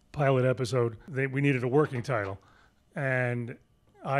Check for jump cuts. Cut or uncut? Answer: cut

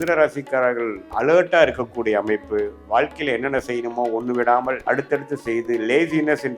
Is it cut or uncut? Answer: cut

